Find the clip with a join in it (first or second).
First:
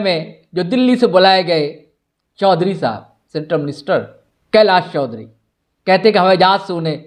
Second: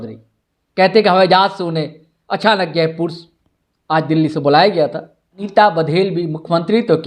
second